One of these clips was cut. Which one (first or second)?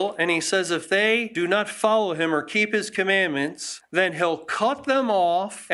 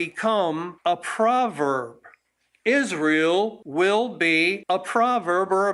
second